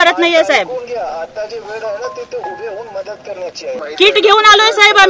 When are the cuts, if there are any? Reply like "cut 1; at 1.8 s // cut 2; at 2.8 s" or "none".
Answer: cut 1; at 3.8 s